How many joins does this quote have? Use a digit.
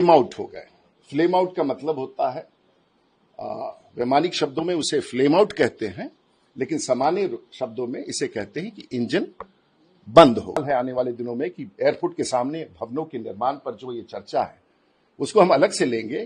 1